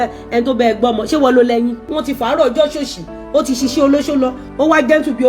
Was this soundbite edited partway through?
yes; 1 cut; at 1.9 s

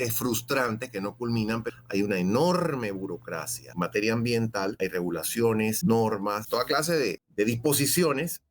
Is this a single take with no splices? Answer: no; 5 cuts; at 1.7 s, 3.6 s, 4.7 s, 5.8 s, 6.7 s

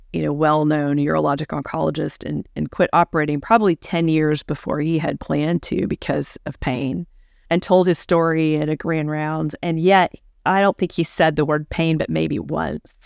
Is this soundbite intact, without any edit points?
yes; 0 cuts

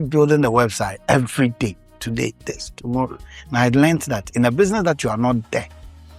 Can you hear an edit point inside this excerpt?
no; 0 cuts

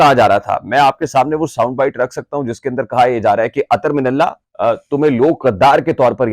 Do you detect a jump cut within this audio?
yes; 1 cut; at 4.5 s

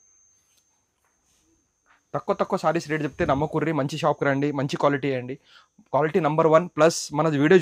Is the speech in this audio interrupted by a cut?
no; 0 cuts

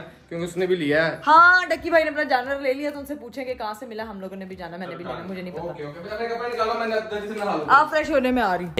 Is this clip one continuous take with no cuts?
yes; 0 cuts

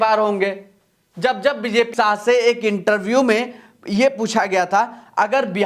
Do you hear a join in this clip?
yes; 1 cut; at 1.9 s

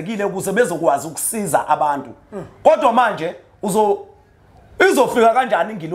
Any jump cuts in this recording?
no; 0 cuts

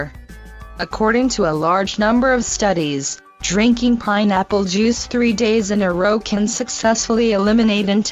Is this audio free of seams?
no; 1 cut; at 5.8 s

